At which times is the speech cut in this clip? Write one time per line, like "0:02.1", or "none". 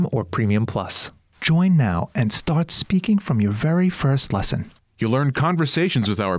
0:01.0